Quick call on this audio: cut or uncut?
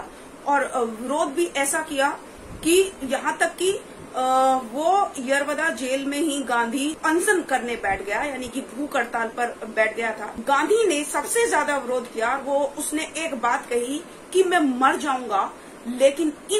cut